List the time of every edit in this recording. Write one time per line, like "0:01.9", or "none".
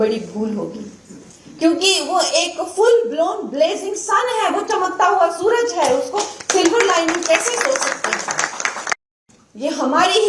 0:09.0